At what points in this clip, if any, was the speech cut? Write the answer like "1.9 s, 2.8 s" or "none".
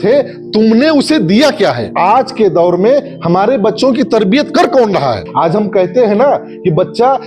1.9 s, 5.2 s